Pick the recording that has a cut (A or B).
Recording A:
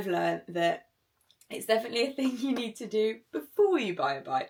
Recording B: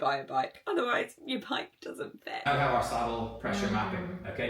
B